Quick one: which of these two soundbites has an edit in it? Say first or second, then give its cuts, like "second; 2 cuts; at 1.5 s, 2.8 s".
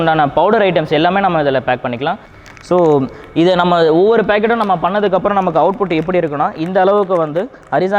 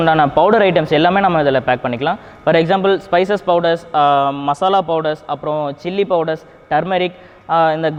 first; 1 cut; at 2.3 s